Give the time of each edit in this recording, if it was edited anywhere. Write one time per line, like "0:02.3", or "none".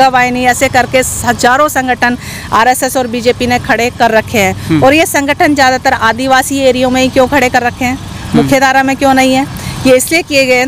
none